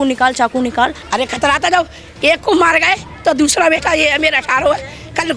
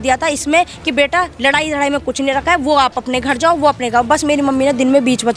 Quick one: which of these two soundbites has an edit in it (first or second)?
first